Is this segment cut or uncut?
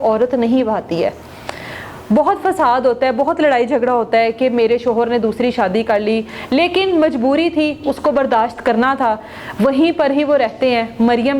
uncut